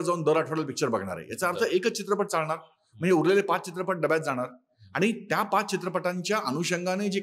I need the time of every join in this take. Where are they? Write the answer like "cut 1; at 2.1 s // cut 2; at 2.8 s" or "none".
none